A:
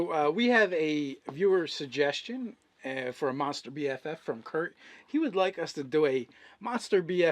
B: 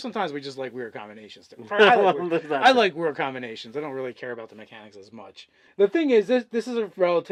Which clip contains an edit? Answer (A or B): A